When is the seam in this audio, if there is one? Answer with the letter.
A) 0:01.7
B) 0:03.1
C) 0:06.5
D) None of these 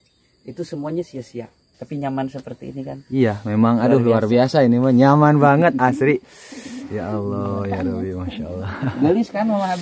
A